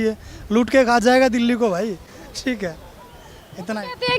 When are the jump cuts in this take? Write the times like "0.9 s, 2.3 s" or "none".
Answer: none